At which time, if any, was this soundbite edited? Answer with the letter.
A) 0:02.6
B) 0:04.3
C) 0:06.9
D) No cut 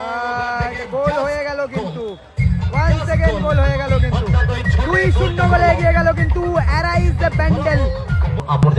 D